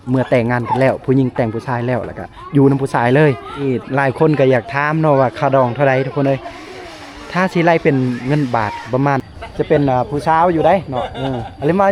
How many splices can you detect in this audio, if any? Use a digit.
2